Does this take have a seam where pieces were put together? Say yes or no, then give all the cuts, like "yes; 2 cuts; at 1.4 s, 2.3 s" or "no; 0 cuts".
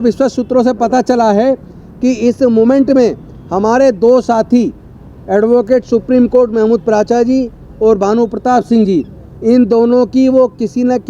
no; 0 cuts